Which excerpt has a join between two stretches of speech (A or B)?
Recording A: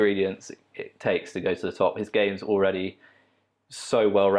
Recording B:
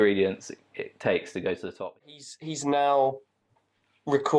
B